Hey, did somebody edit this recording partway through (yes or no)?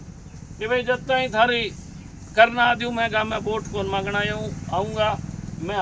no